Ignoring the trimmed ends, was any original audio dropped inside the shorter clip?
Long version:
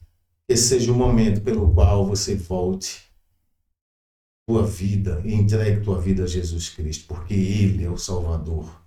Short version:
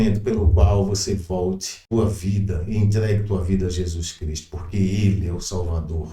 yes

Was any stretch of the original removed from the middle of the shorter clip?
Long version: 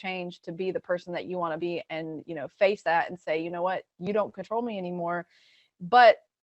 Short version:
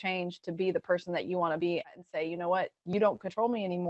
yes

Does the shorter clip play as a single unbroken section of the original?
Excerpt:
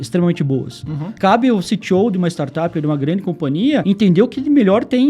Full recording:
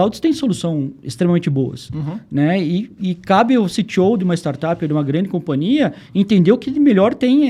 no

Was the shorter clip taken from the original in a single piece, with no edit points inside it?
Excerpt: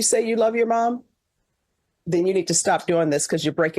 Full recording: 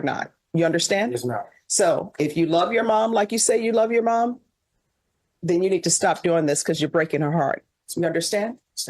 yes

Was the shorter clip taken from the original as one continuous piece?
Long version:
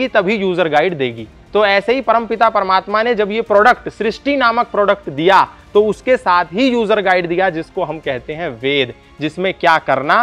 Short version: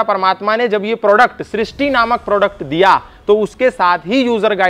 yes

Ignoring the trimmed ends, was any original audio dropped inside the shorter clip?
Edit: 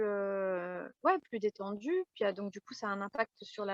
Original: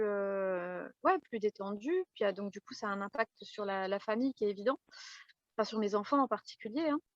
no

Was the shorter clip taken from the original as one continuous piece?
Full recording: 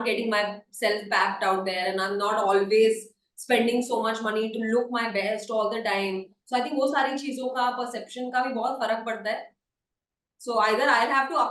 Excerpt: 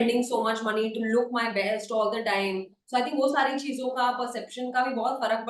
yes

